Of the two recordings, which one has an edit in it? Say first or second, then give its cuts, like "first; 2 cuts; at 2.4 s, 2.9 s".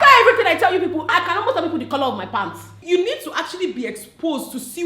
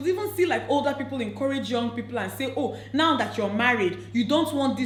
first; 2 cuts; at 1.1 s, 2.8 s